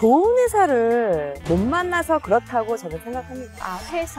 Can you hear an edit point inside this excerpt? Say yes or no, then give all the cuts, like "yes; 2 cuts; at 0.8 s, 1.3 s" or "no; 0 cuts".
no; 0 cuts